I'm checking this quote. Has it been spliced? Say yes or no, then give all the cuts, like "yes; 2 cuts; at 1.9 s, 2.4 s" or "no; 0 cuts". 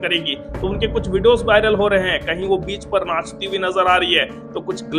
no; 0 cuts